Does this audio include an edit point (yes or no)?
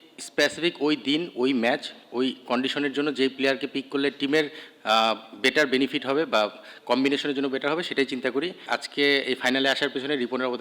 yes